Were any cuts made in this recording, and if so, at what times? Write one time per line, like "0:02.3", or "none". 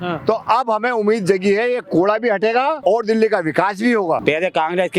0:02.8
0:04.2